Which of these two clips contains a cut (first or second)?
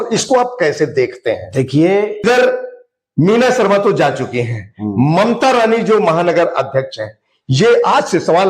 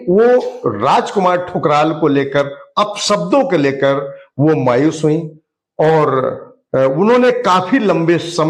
first